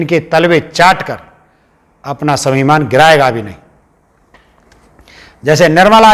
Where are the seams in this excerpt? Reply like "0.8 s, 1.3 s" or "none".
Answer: none